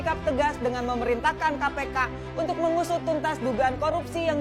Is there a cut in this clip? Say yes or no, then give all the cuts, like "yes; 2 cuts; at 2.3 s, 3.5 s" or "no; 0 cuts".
no; 0 cuts